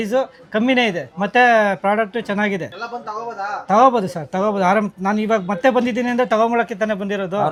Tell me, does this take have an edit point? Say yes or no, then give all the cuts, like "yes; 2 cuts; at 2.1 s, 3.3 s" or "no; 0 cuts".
no; 0 cuts